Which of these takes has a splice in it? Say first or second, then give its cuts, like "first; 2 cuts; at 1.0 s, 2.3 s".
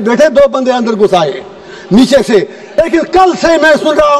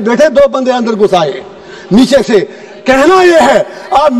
first; 1 cut; at 2.6 s